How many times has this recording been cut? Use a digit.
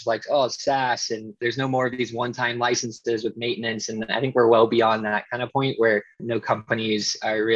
2